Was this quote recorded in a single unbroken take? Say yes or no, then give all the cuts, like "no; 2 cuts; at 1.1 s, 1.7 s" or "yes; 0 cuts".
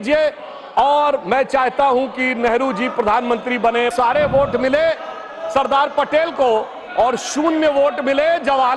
no; 1 cut; at 3.9 s